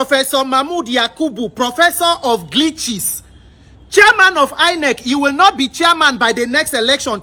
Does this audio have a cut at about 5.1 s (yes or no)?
no